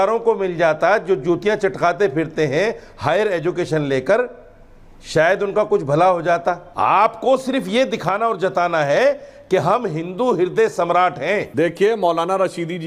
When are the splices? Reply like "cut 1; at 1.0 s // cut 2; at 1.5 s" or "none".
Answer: cut 1; at 6.7 s // cut 2; at 11.5 s